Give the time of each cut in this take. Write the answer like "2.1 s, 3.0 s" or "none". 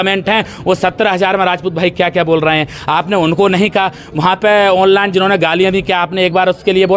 none